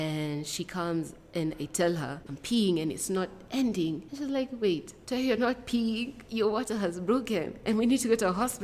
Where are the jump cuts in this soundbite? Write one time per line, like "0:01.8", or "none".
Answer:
0:02.3
0:04.1
0:04.9
0:06.2